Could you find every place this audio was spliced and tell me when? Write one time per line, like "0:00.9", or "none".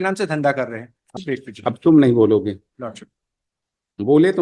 0:01.0